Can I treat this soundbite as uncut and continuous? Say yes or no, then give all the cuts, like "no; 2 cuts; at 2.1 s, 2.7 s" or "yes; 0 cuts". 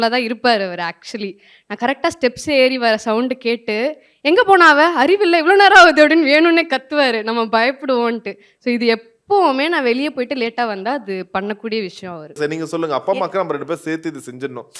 no; 1 cut; at 12.4 s